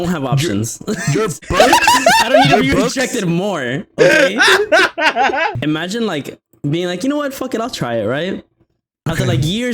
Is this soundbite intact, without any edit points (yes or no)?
no